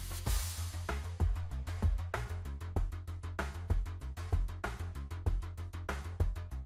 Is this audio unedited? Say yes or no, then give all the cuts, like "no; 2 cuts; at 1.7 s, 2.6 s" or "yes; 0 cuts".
yes; 0 cuts